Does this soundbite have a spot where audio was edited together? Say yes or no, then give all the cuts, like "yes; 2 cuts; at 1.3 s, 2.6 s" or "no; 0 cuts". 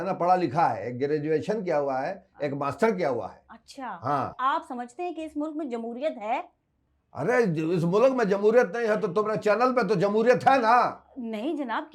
yes; 1 cut; at 4.3 s